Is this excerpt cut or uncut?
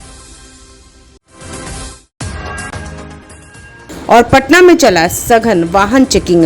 cut